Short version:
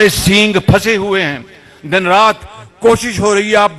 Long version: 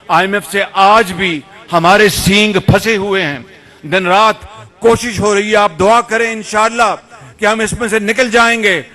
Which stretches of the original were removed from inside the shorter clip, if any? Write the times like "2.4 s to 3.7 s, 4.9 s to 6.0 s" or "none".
none